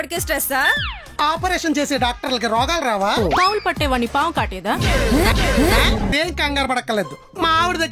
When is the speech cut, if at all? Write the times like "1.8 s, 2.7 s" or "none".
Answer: 6.1 s

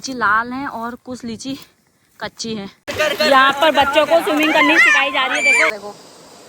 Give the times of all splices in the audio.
2.8 s, 5.7 s

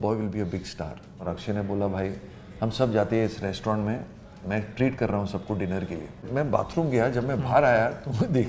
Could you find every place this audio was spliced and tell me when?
1.2 s, 6.2 s

